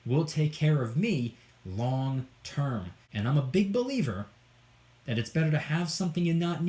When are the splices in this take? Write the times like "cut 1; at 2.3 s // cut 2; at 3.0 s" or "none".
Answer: cut 1; at 3.0 s